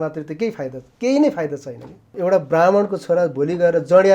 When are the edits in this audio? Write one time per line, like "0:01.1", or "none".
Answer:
0:02.1